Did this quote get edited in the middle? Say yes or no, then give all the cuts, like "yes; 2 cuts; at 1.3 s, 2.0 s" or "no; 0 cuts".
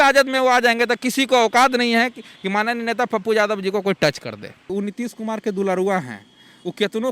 yes; 1 cut; at 4.7 s